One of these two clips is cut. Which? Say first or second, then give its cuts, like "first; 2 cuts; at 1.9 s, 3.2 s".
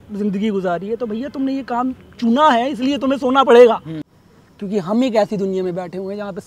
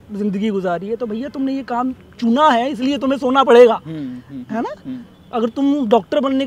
first; 1 cut; at 4.4 s